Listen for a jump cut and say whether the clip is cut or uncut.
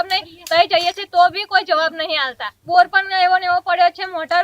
cut